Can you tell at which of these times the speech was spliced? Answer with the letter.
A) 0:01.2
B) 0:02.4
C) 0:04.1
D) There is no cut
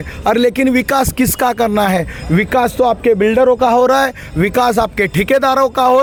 D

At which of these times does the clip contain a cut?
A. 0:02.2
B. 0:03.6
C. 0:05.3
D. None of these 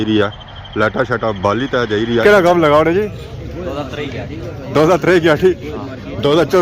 A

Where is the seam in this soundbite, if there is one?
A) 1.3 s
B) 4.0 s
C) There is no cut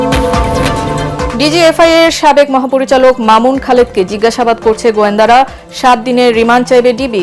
A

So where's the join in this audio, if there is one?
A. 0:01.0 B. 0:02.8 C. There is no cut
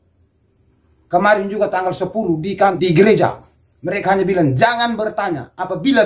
B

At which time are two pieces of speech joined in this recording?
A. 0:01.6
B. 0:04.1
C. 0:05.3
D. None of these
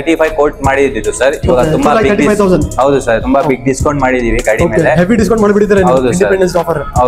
D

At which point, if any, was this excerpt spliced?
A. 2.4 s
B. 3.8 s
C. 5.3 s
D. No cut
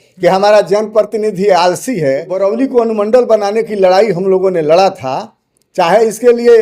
A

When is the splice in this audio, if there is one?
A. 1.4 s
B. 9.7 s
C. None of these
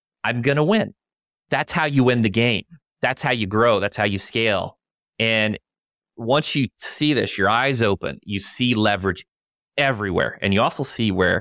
A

